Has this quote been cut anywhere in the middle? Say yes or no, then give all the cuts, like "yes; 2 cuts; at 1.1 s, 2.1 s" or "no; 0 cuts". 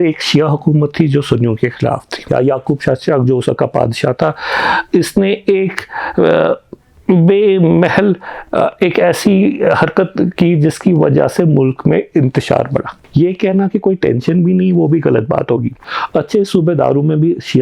yes; 3 cuts; at 2.1 s, 13.0 s, 15.9 s